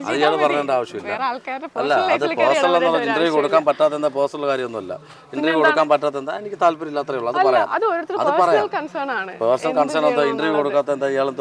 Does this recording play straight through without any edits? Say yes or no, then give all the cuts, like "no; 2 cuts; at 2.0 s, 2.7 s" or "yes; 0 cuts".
yes; 0 cuts